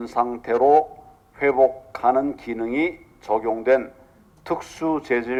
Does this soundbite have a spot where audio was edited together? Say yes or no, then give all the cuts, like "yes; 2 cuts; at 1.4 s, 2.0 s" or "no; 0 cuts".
no; 0 cuts